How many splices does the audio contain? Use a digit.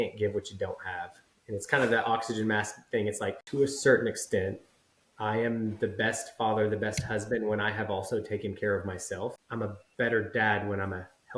2